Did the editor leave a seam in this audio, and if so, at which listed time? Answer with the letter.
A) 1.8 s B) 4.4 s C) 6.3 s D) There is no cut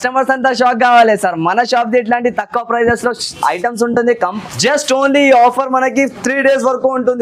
B